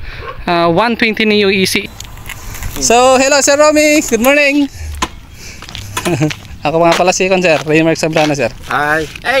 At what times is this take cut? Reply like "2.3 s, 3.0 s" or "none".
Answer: 1.8 s